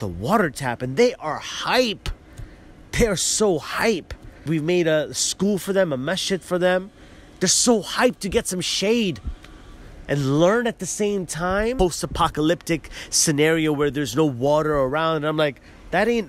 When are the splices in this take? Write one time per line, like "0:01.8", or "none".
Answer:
0:04.5
0:11.8